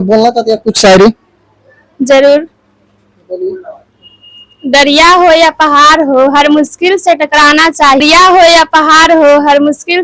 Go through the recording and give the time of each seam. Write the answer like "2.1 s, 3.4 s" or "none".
8.0 s